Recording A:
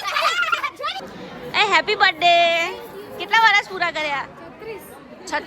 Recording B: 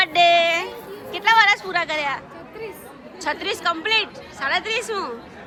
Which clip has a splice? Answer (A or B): A